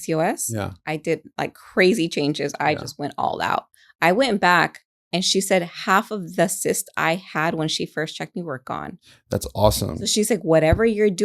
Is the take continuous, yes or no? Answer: yes